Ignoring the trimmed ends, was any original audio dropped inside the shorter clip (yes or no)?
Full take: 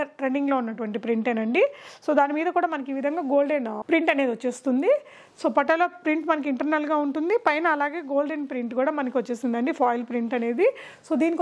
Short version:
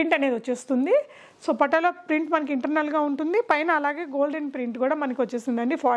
no